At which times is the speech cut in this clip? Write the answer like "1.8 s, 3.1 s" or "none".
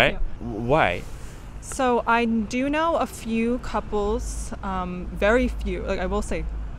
none